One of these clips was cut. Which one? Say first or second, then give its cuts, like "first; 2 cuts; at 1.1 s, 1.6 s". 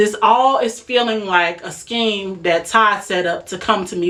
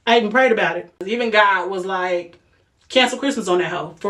second; 1 cut; at 1.1 s